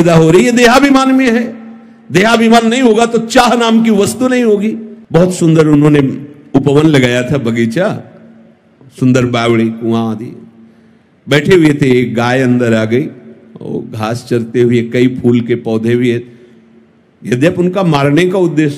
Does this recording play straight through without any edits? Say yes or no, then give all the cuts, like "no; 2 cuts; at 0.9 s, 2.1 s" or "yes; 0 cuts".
yes; 0 cuts